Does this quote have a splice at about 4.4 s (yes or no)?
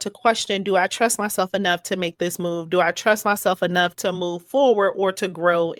no